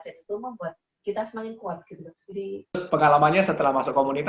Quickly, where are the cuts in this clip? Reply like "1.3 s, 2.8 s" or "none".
2.8 s

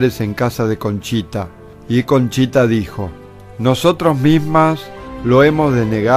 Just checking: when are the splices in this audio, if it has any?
5.1 s

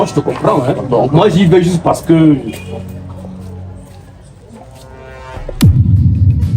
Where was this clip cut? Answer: 5.5 s

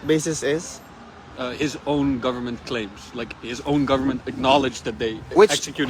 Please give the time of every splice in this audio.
none

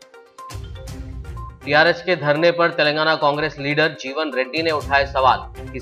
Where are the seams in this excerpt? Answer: 1.0 s

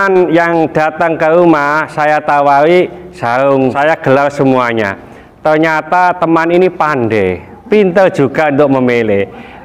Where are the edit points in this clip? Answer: 3.7 s

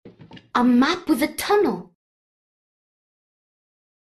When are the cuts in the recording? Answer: none

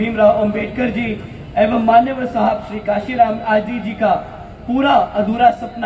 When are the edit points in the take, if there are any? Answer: none

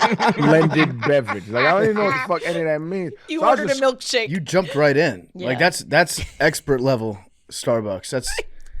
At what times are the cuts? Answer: 4.4 s

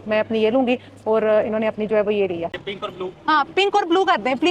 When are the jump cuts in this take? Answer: 2.5 s

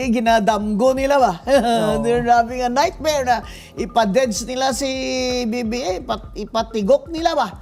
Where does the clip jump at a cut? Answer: none

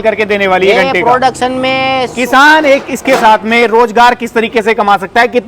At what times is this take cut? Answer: 2.1 s

